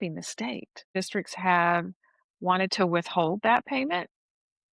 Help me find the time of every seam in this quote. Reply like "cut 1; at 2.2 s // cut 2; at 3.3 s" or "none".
cut 1; at 0.9 s